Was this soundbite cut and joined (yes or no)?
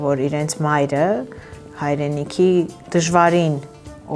no